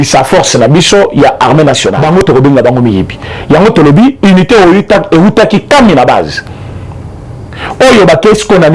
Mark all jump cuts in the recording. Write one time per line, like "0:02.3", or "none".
0:01.9